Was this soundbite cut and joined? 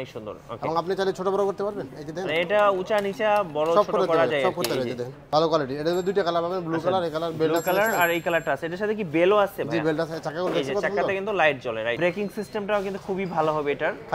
yes; 2 cuts; at 5.2 s, 12.0 s

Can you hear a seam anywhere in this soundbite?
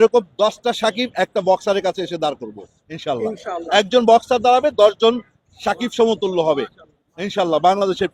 no; 0 cuts

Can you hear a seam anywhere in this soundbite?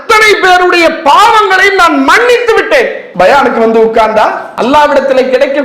yes; 1 cut; at 4.5 s

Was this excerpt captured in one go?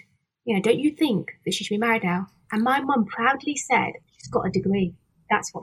no; 1 cut; at 4.1 s

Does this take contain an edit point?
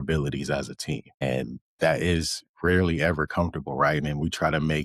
no; 0 cuts

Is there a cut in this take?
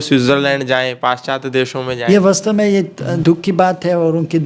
yes; 2 cuts; at 2.0 s, 3.0 s

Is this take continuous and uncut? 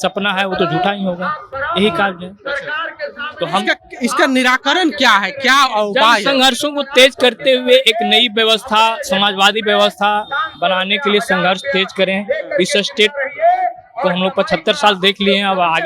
yes; 0 cuts

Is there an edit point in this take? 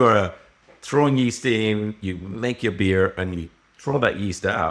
no; 0 cuts

